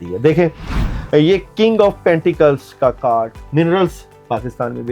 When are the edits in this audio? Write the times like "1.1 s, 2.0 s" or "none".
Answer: 3.4 s